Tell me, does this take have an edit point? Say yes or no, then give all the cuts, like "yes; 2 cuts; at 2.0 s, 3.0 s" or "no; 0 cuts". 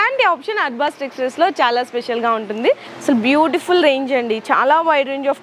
yes; 1 cut; at 2.9 s